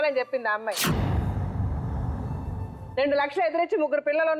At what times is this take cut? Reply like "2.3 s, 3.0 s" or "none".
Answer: none